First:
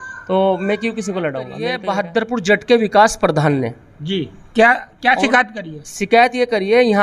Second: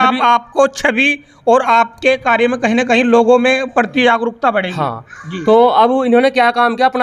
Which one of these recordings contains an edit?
first; 1 cut; at 1.8 s

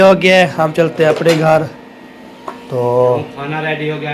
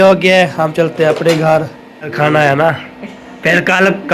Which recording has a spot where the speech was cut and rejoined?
second; 1 cut; at 2.1 s

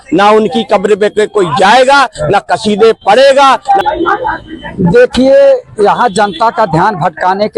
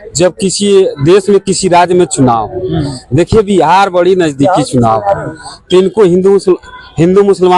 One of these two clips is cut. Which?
first; 1 cut; at 3.8 s

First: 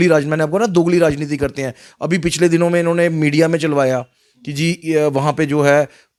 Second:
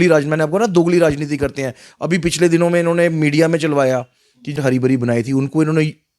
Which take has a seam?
second; 1 cut; at 4.6 s

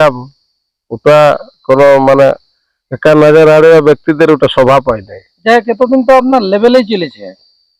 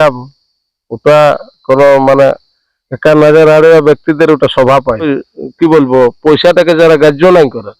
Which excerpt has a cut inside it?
second; 1 cut; at 5.2 s

